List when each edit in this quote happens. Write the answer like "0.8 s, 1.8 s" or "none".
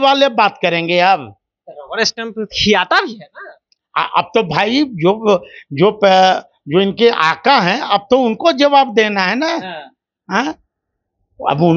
none